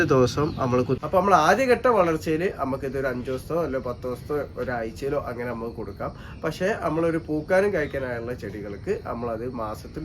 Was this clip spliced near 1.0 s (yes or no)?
yes